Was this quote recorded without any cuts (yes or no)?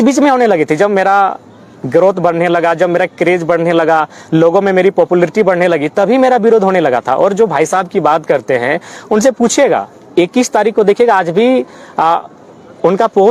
yes